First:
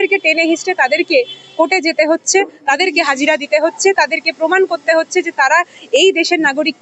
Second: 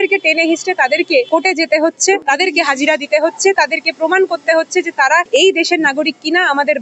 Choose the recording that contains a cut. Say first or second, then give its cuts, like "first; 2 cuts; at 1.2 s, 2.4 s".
second; 3 cuts; at 1.3 s, 2.2 s, 5.3 s